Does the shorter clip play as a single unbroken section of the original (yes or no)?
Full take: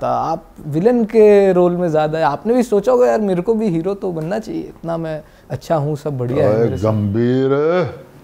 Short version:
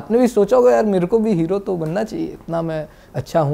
yes